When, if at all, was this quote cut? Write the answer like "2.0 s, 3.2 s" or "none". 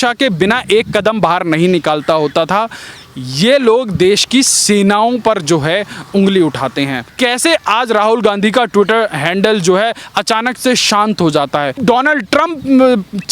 7.1 s, 11.8 s